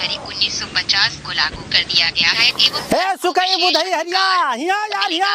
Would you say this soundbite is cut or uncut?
cut